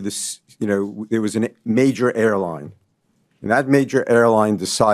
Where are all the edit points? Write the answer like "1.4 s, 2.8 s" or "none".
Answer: none